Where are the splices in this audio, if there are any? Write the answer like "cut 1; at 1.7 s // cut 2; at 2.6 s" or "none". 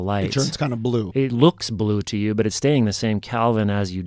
cut 1; at 1.1 s